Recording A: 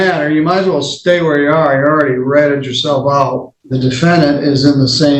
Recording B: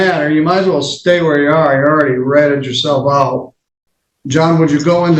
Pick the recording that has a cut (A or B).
A